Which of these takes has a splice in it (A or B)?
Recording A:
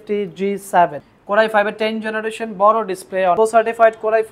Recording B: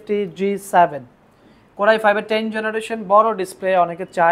A